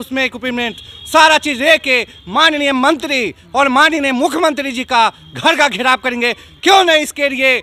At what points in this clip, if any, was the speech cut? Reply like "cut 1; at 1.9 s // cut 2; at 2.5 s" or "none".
none